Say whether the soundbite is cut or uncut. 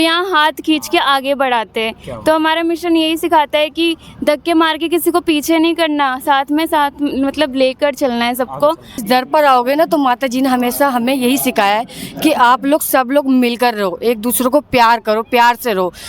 cut